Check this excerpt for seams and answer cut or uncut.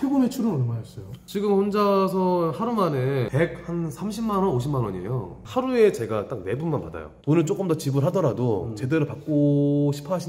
cut